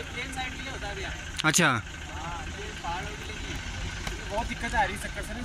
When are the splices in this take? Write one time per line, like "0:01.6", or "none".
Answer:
none